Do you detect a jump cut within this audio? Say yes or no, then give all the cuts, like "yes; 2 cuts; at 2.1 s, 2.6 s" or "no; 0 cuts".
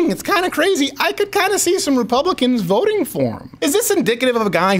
yes; 1 cut; at 3.5 s